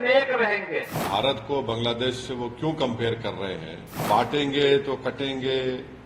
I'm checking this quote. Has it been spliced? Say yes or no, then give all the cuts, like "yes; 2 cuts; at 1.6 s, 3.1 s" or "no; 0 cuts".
yes; 2 cuts; at 1.0 s, 3.9 s